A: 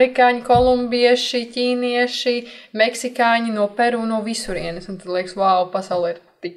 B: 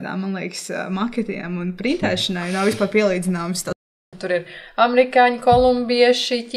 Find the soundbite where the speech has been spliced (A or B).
B